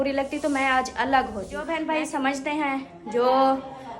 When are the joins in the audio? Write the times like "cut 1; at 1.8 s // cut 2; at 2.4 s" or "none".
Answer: cut 1; at 1.6 s